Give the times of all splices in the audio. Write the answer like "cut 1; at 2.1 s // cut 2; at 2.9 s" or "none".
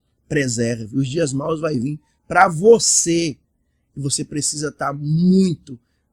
none